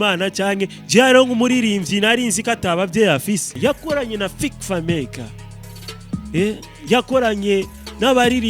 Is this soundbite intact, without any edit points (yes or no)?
no